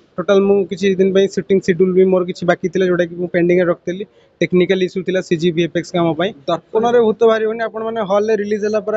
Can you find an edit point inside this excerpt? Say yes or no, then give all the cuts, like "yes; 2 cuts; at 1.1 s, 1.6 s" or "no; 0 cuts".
yes; 1 cut; at 6.4 s